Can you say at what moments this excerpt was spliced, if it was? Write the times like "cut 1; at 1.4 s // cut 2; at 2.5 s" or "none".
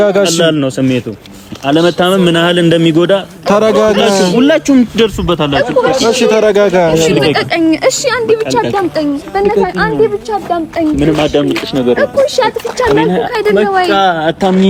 none